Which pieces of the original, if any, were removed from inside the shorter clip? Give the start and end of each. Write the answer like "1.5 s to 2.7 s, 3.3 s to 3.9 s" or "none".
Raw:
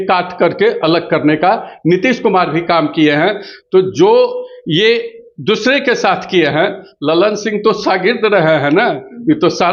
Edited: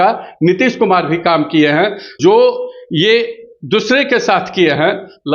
3.6 s to 3.9 s